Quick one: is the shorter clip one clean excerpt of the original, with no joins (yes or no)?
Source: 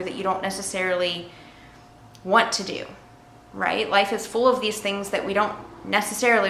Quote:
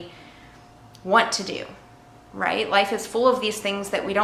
yes